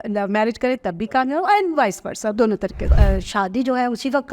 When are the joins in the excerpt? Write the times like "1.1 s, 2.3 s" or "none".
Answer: 2.8 s

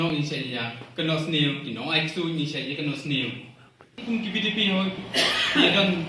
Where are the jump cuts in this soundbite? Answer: 4.0 s

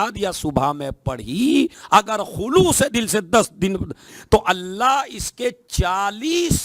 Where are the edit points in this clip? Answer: 1.8 s, 4.1 s

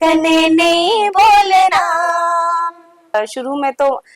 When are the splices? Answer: 3.1 s

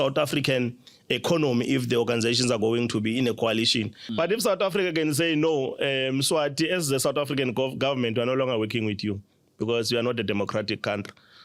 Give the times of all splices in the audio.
4.0 s

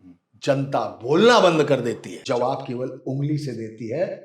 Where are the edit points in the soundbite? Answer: 2.2 s

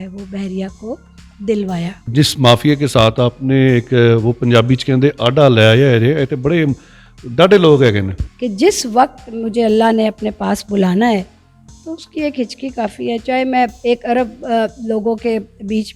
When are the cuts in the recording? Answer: 2.0 s, 8.2 s, 13.8 s

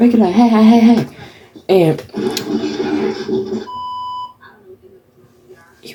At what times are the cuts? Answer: none

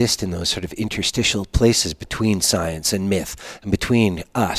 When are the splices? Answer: none

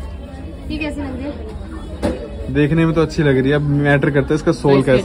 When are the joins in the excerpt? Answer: none

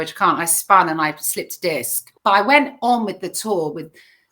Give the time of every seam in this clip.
2.1 s

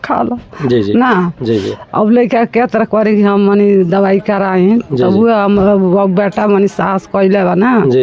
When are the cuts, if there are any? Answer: none

